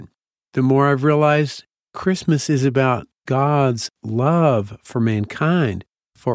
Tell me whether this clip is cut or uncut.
uncut